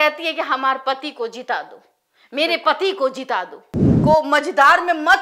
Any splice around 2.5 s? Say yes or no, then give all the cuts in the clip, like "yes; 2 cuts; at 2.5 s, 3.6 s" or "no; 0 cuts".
no; 1 cut; at 3.9 s